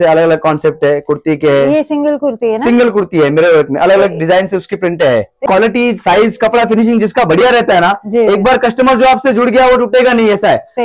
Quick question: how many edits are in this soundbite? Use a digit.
1